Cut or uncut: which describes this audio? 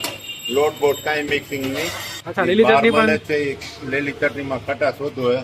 cut